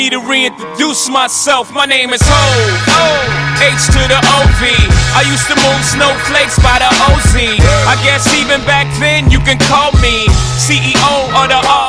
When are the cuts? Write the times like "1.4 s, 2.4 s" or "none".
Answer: none